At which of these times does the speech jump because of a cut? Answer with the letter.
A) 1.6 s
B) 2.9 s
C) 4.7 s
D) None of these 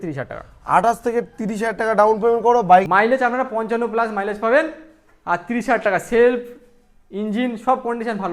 B